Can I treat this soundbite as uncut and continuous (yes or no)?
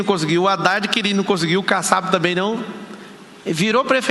no